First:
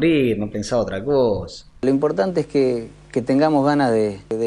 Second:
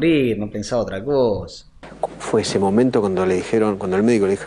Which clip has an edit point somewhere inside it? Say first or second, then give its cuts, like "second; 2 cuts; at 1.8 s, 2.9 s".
first; 1 cut; at 1.7 s